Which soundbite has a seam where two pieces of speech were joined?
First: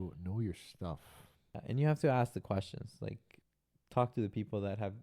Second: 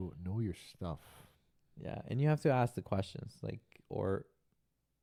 first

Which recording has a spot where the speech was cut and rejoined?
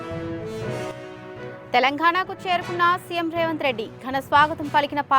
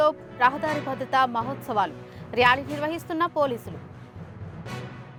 first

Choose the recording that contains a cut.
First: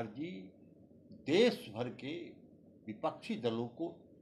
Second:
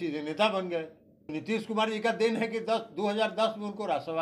second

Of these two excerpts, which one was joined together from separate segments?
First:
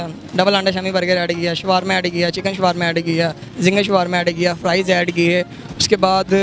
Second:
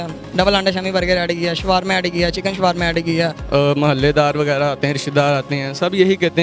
second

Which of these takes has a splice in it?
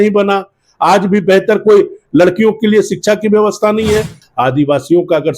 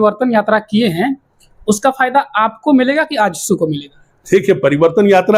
first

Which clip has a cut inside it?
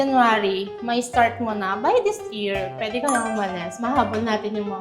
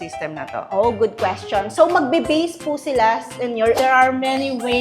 second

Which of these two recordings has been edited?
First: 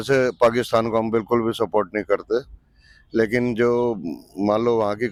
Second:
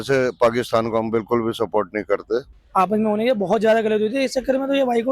second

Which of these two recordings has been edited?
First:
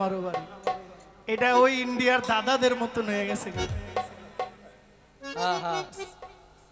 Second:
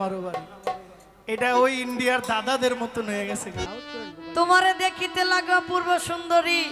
second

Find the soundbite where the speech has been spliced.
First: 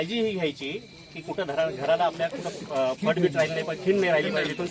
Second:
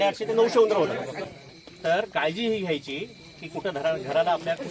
second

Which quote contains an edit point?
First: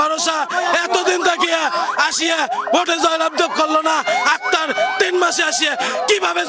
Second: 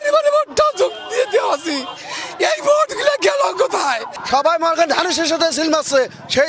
second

